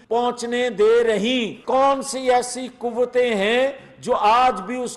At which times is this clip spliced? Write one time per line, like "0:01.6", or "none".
0:01.6